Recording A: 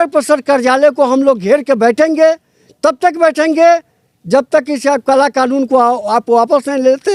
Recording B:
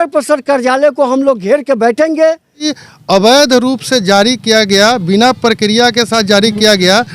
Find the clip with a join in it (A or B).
B